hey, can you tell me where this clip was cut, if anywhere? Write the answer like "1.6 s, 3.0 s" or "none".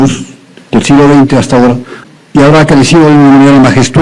1.9 s